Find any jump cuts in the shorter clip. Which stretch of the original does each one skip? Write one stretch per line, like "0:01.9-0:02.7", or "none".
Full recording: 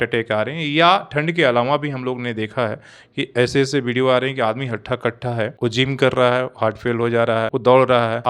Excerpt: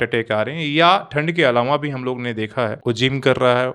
0:02.8-0:05.5

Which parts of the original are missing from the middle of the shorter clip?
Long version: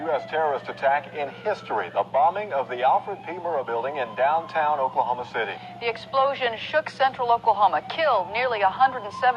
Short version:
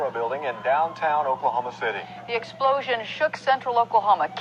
none

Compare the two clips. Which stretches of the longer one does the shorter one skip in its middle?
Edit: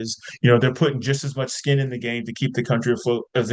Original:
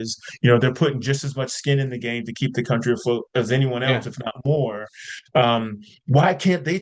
none

